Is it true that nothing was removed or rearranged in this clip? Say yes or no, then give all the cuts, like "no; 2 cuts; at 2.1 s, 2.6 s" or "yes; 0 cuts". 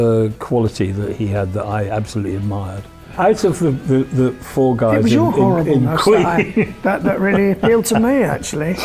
no; 1 cut; at 3.1 s